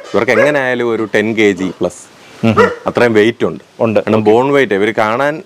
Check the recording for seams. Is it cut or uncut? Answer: uncut